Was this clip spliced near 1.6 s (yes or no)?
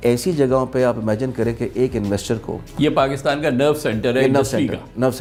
no